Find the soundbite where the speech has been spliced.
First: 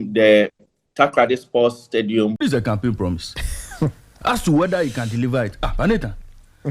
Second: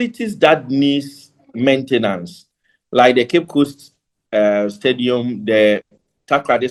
first; 1 cut; at 2.4 s

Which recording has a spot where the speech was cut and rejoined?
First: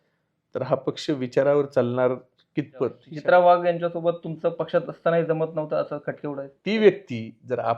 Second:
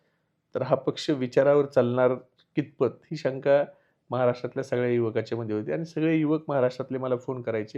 first; 2 cuts; at 3.1 s, 6.5 s

